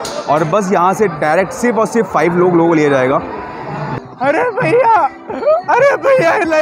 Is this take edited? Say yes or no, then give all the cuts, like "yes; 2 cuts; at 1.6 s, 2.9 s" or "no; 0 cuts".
yes; 1 cut; at 3.8 s